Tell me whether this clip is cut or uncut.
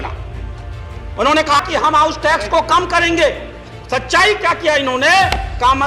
cut